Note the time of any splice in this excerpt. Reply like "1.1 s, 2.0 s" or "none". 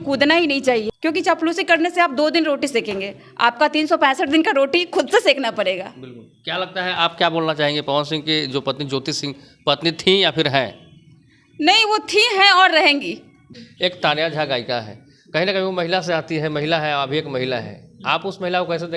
0.9 s, 13.4 s